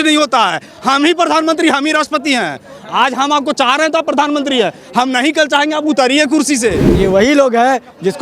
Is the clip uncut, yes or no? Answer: no